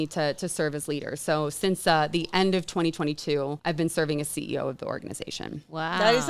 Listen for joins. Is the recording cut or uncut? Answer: cut